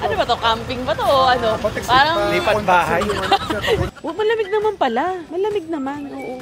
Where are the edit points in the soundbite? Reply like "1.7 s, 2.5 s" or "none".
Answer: 3.9 s, 5.3 s